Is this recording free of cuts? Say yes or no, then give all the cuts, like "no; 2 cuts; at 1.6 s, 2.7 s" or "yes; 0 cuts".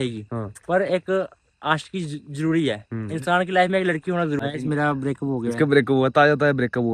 no; 1 cut; at 4.4 s